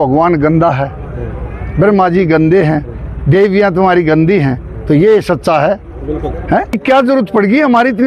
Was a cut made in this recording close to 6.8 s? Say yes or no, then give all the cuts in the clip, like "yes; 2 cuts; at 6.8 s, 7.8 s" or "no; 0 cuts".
yes; 1 cut; at 6.8 s